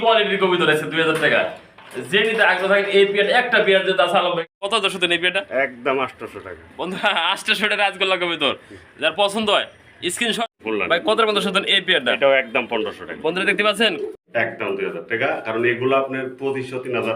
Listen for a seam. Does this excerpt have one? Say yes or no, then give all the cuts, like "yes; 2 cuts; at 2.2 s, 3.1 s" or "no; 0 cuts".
yes; 3 cuts; at 4.5 s, 10.4 s, 14.2 s